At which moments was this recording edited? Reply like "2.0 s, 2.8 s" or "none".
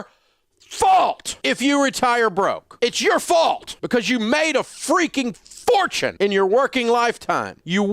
1.4 s